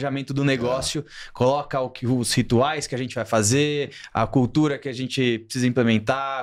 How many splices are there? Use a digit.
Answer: 0